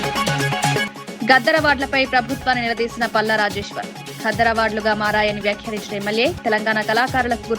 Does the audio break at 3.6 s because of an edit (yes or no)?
no